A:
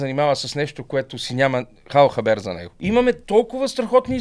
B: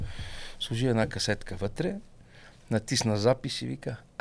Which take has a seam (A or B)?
A